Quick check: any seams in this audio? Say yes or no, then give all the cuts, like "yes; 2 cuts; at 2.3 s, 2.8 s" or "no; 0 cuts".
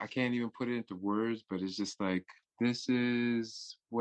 yes; 1 cut; at 2.5 s